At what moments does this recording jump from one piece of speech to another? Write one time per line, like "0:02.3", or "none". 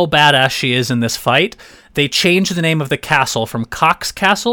none